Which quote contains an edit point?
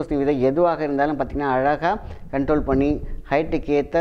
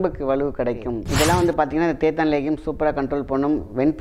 second; 1 cut; at 1.0 s

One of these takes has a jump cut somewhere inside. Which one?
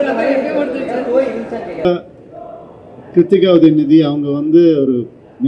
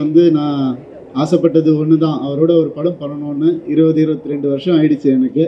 first; 1 cut; at 1.8 s

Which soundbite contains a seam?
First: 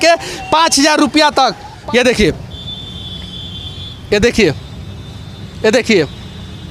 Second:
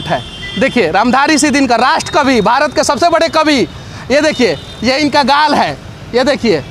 first; 1 cut; at 1.7 s

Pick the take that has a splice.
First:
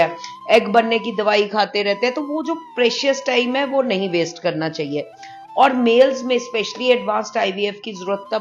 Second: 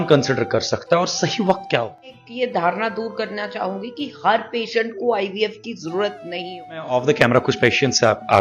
second; 2 cuts; at 2.2 s, 6.9 s

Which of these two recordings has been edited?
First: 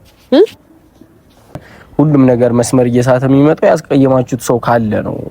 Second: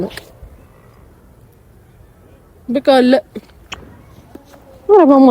first; 1 cut; at 1.6 s

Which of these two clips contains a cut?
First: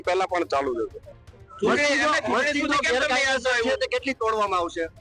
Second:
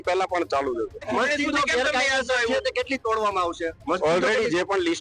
second; 1 cut; at 1.0 s

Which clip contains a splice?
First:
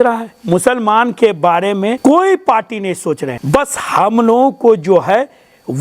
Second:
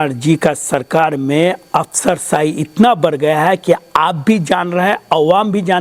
first; 2 cuts; at 2.0 s, 3.3 s

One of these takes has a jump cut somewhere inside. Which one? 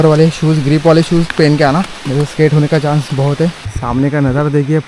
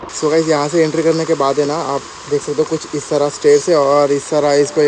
first; 2 cuts; at 2.0 s, 3.7 s

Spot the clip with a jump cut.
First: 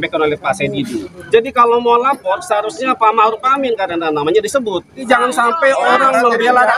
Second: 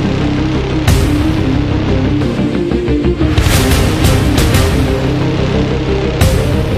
first; 2 cuts; at 1.1 s, 5.0 s

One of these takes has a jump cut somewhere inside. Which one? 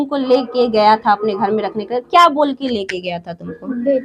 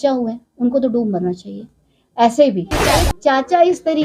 second; 1 cut; at 2.9 s

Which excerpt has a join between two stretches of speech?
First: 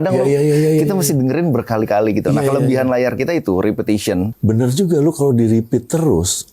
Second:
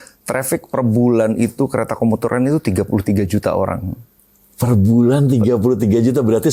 first; 1 cut; at 4.3 s

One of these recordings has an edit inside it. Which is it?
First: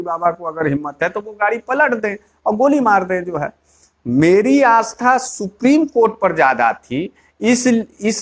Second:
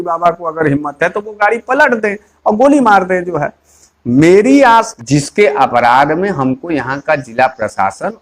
second; 1 cut; at 4.9 s

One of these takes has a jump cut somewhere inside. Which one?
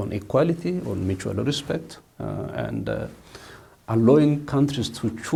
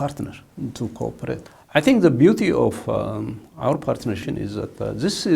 second; 2 cuts; at 1.5 s, 4.2 s

